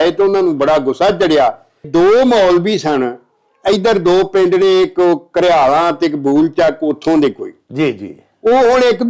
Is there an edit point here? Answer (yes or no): yes